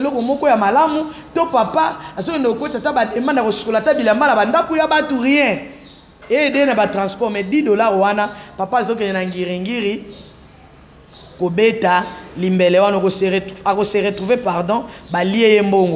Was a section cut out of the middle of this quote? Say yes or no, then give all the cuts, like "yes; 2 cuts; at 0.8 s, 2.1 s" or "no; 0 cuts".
no; 0 cuts